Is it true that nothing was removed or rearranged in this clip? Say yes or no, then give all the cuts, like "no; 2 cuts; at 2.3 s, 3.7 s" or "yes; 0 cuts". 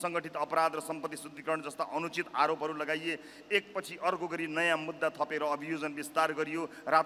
yes; 0 cuts